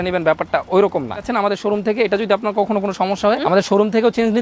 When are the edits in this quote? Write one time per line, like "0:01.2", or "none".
0:01.3
0:03.4